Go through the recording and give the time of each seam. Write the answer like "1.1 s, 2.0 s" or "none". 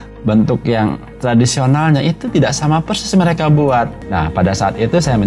4.0 s